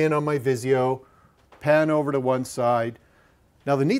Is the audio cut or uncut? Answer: cut